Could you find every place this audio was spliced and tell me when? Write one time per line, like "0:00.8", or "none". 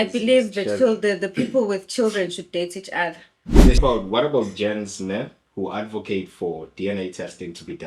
0:03.8